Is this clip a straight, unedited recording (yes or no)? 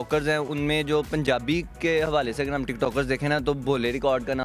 yes